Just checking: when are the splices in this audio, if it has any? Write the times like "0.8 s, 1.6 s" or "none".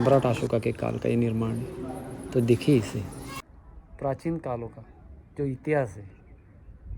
3.3 s